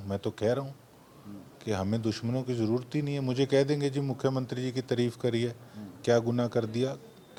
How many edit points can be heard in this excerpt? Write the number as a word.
zero